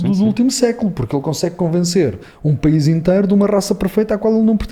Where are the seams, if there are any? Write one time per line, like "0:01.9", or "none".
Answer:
none